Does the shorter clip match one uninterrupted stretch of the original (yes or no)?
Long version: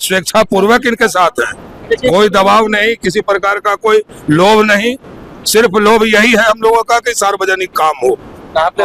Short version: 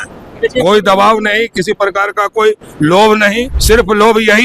no